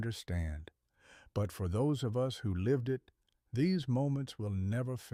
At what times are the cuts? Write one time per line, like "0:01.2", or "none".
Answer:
none